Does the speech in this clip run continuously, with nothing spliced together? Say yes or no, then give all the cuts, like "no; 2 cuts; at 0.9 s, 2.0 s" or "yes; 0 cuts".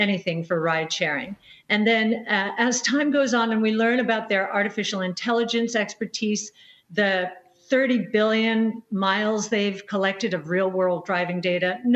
no; 1 cut; at 1.5 s